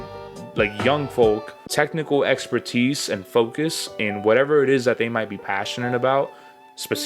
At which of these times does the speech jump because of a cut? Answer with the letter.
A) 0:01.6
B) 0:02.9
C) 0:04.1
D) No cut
A